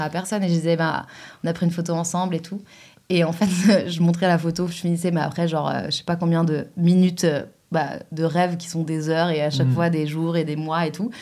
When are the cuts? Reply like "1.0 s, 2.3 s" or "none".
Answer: none